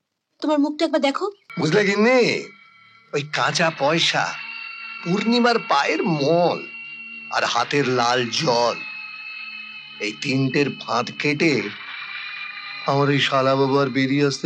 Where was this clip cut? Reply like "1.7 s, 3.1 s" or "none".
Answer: 1.4 s